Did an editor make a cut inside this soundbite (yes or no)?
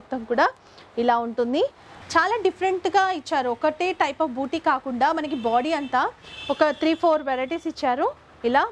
yes